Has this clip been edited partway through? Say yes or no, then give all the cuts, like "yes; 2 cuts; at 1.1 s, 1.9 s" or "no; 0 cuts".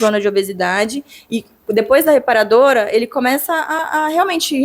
no; 0 cuts